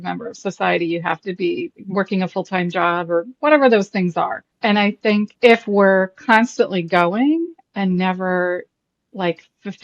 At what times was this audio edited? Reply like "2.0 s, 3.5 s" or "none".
1.8 s, 4.5 s, 5.3 s